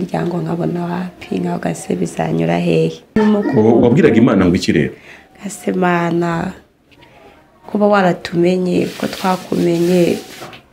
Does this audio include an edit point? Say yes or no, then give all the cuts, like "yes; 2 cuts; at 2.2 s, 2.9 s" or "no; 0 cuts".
yes; 1 cut; at 3.2 s